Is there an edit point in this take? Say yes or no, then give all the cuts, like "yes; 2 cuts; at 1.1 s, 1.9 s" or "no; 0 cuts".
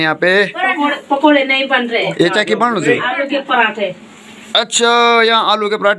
no; 0 cuts